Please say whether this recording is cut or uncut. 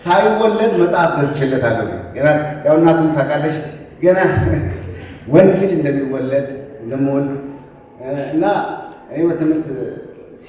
uncut